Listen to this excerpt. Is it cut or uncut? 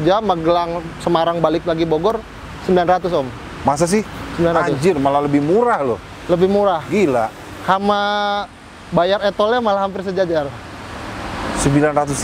uncut